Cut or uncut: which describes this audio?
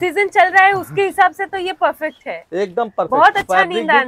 uncut